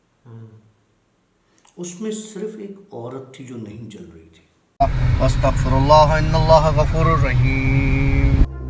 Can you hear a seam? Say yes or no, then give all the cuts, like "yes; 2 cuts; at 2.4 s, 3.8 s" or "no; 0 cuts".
yes; 1 cut; at 4.6 s